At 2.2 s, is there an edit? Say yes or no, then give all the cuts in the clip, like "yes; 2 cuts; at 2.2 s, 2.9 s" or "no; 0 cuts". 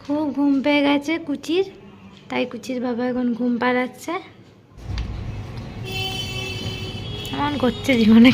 no; 1 cut; at 4.8 s